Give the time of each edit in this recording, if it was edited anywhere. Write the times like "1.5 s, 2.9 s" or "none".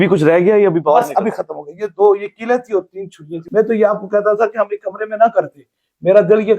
3.4 s